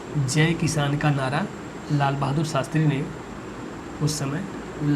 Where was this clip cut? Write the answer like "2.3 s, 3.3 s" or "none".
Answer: none